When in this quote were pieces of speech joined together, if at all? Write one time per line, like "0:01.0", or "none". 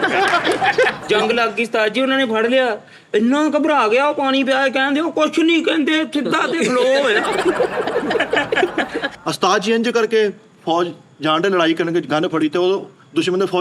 0:01.0
0:09.2